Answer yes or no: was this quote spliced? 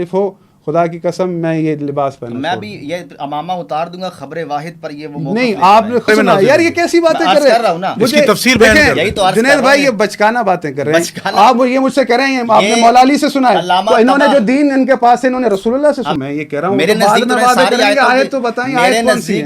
yes